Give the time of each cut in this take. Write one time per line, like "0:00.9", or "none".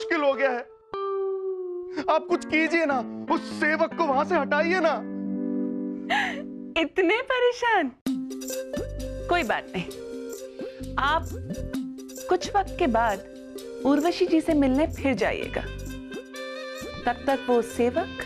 none